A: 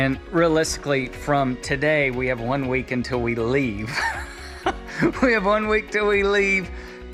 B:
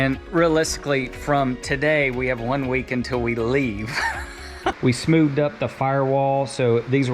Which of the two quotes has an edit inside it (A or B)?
B